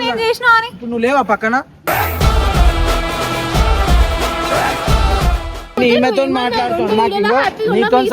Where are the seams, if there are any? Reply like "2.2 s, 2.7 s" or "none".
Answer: 5.8 s